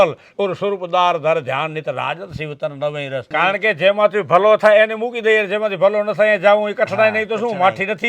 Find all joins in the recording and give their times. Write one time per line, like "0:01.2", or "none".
0:03.3